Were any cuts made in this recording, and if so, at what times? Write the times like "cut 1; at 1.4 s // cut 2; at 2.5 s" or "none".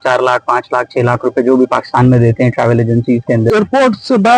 cut 1; at 3.5 s